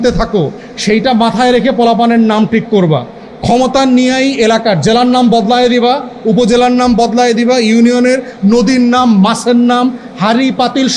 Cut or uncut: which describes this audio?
uncut